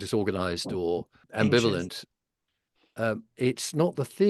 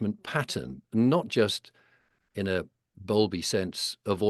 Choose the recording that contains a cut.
first; 1 cut; at 1.2 s

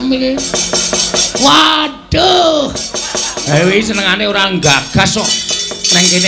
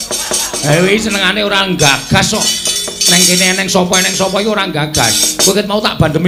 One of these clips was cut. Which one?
first; 1 cut; at 1.3 s

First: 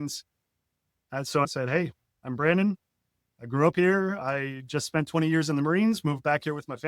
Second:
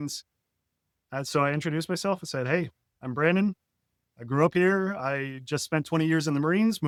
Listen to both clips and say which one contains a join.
first; 1 cut; at 1.5 s

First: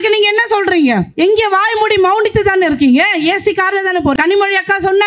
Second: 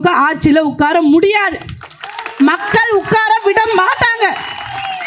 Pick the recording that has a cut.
first; 2 cuts; at 1.1 s, 4.1 s

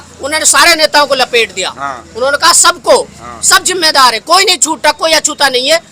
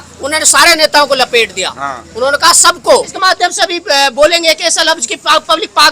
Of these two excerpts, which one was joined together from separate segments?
second; 1 cut; at 3.1 s

